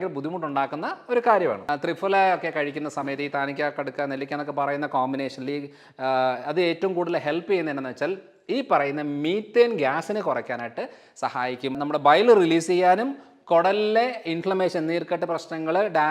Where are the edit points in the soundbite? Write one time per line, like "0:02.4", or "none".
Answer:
0:01.6
0:11.8